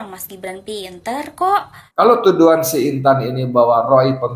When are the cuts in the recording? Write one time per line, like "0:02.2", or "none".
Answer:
0:01.8